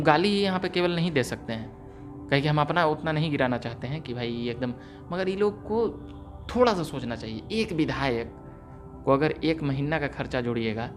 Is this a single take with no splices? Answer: yes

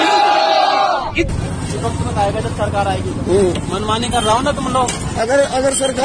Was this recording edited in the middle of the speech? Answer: yes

